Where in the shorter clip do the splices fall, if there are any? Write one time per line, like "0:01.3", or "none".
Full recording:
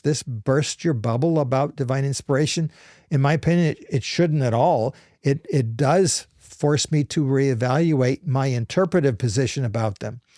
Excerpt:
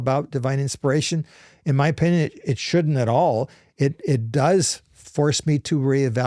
none